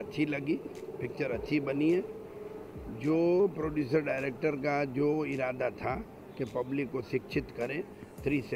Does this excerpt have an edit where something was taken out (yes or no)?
no